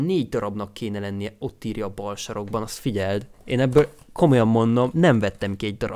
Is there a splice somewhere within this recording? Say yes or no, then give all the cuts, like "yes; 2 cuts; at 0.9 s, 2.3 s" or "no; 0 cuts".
yes; 1 cut; at 4.9 s